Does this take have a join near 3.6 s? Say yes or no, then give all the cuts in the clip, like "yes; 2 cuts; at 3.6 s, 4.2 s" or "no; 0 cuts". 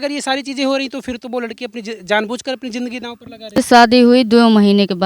yes; 1 cut; at 3.6 s